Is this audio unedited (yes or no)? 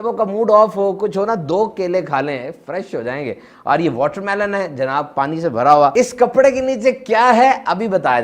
yes